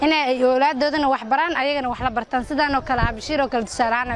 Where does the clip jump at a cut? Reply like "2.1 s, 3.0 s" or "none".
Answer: none